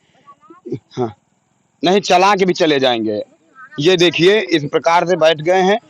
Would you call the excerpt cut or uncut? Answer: uncut